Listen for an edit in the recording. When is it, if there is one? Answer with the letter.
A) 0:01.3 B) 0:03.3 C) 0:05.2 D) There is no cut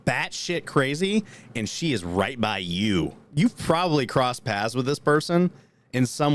B